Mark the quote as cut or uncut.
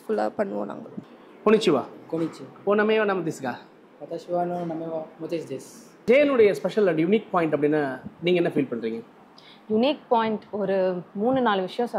cut